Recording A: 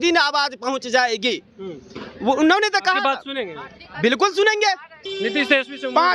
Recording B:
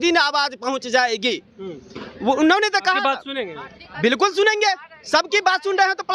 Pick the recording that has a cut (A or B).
A